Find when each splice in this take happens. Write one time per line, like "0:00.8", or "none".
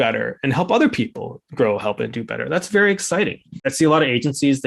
0:03.7

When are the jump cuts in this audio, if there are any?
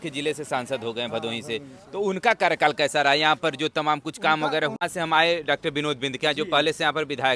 0:04.9

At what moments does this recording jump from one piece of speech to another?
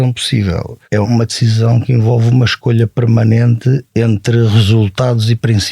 0:01.0

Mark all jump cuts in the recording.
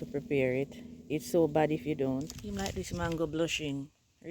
0:02.4

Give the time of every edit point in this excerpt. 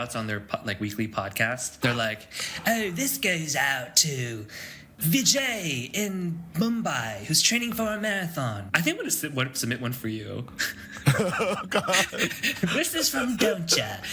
0:01.7
0:04.8
0:08.6

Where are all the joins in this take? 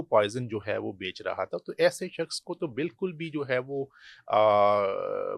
none

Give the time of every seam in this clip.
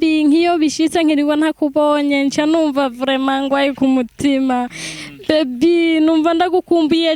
none

